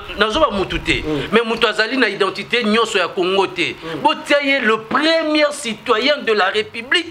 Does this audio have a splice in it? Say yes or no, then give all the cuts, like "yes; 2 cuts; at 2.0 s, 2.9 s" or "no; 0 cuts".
no; 0 cuts